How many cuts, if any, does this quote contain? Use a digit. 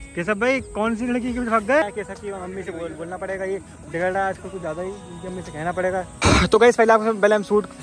2